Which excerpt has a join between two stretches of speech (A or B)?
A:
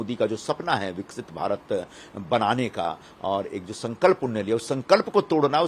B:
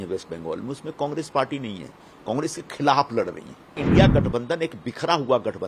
B